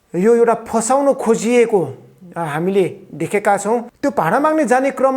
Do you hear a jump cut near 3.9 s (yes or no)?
yes